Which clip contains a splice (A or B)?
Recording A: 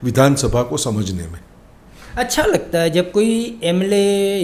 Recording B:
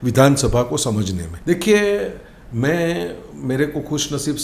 B